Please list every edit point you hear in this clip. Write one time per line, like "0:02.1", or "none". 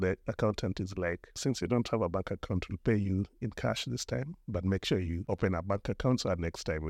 0:01.4
0:05.2

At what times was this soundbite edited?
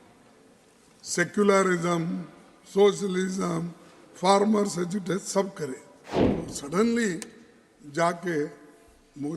0:06.3

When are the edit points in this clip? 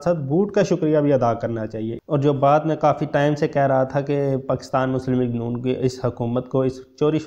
0:01.9

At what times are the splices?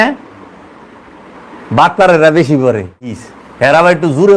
0:03.2

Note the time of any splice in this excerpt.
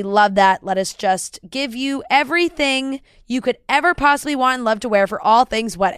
none

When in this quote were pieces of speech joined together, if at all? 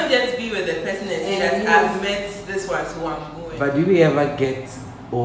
0:03.4

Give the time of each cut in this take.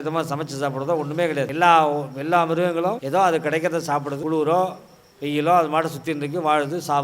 0:01.5
0:03.0
0:04.1

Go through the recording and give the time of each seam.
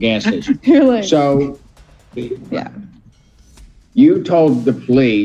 none

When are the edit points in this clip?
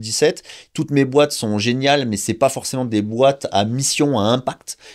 none

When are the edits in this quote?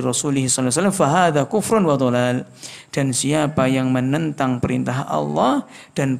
none

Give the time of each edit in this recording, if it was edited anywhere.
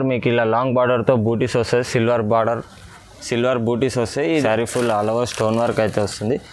0:04.4

